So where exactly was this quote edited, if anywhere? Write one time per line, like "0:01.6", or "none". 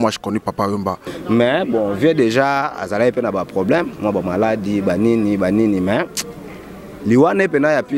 0:01.1